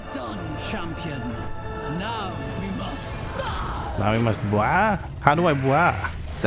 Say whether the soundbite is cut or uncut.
uncut